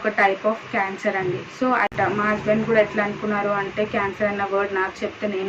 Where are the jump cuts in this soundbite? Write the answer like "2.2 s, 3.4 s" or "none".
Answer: 1.9 s